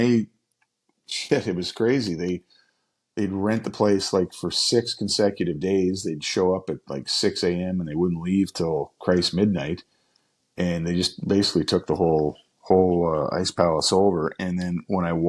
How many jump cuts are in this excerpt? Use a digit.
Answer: 0